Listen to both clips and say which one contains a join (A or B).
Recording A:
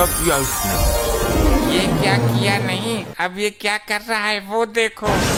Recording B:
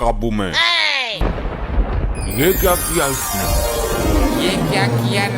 B